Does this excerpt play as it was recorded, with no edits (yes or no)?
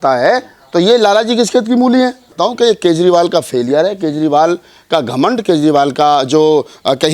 no